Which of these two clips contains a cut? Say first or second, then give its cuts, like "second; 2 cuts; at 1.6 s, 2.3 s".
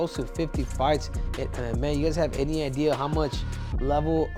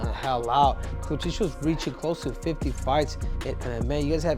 second; 1 cut; at 0.9 s